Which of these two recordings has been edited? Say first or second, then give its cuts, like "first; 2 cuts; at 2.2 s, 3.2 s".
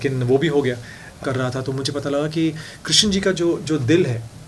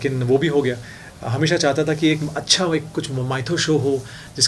first; 1 cut; at 1.2 s